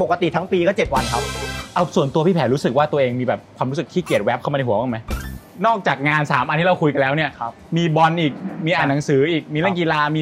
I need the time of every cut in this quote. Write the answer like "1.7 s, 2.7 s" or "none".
1.6 s, 5.3 s